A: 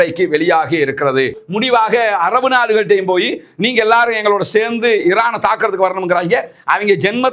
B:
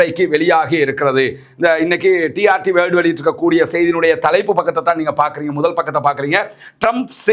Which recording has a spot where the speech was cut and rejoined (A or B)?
A